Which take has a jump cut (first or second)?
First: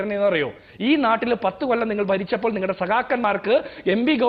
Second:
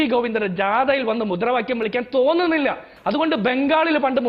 second